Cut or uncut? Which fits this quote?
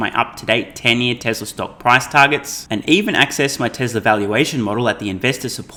uncut